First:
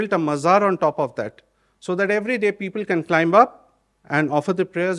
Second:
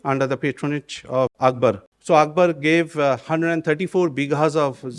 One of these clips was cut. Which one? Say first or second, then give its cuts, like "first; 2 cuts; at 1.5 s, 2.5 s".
second; 1 cut; at 1.4 s